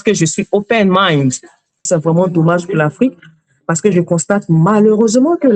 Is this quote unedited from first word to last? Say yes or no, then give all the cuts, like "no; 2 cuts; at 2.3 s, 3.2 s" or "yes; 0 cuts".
no; 1 cut; at 1.8 s